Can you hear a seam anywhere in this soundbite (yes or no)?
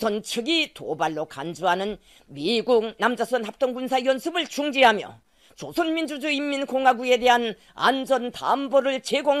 yes